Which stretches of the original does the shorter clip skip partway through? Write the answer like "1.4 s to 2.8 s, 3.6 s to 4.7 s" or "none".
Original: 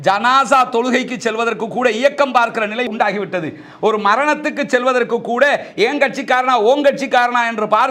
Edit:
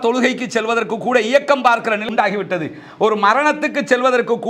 2.8 s to 2.9 s